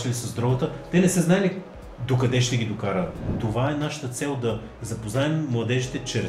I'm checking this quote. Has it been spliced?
yes; 1 cut; at 3.2 s

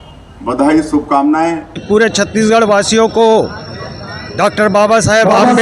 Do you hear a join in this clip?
yes; 1 cut; at 1.8 s

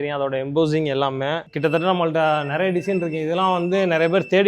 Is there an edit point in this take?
yes; 1 cut; at 1.4 s

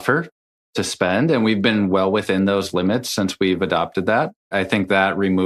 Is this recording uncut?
no; 1 cut; at 4.5 s

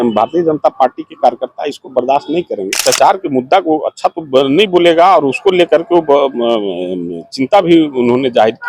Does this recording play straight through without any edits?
no; 1 cut; at 2.7 s

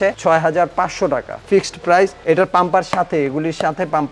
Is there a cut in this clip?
no; 0 cuts

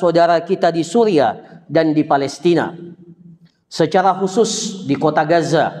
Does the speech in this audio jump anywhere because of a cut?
no; 0 cuts

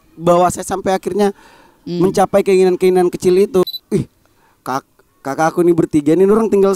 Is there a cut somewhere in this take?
yes; 1 cut; at 3.6 s

